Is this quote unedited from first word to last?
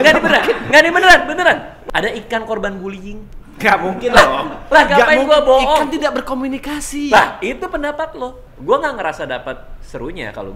no; 2 cuts; at 1.7 s, 8.4 s

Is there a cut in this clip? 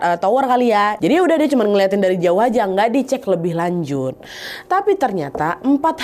yes; 1 cut; at 1.0 s

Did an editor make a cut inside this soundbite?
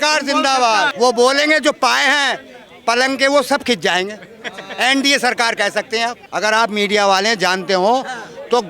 yes; 2 cuts; at 0.9 s, 6.2 s

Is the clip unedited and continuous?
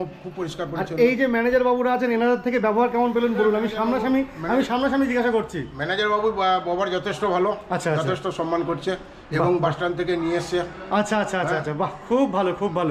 yes; 0 cuts

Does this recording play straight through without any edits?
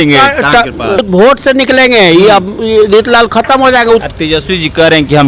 no; 2 cuts; at 1.0 s, 4.0 s

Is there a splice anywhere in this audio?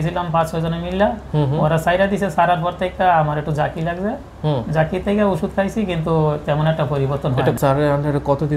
yes; 1 cut; at 7.6 s

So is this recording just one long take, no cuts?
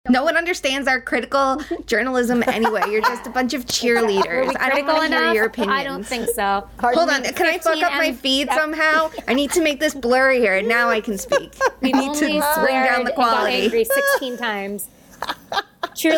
yes; 0 cuts

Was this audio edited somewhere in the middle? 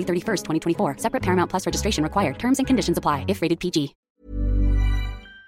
yes; 1 cut; at 4.0 s

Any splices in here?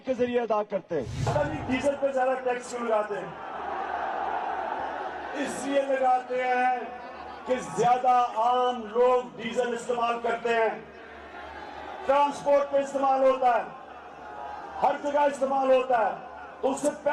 no; 0 cuts

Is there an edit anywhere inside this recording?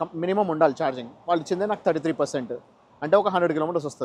no; 0 cuts

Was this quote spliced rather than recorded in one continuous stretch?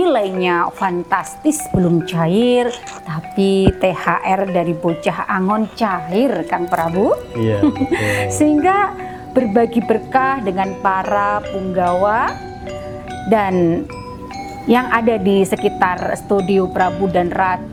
no; 0 cuts

